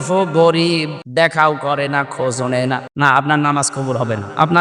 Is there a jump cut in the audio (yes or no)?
yes